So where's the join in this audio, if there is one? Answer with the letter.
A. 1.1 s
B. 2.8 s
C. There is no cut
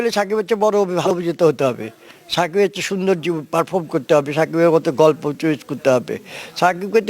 A